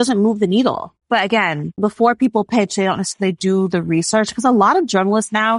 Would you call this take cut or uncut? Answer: cut